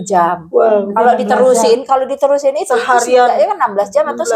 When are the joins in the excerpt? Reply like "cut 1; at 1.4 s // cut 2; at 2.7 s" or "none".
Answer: none